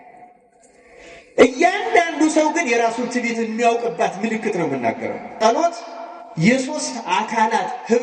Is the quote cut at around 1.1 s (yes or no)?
no